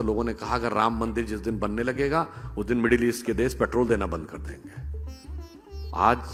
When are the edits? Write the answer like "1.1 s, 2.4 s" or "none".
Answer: none